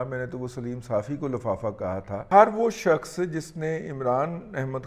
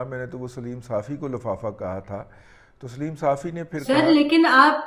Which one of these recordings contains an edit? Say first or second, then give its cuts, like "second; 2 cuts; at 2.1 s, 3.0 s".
first; 1 cut; at 2.3 s